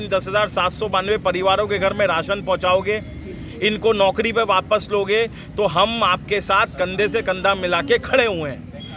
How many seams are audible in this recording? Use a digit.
0